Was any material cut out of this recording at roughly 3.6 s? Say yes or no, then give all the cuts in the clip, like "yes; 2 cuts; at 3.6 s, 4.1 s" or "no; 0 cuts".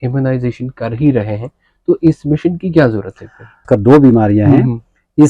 yes; 1 cut; at 3.6 s